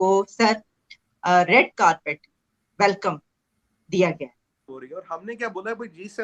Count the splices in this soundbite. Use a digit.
1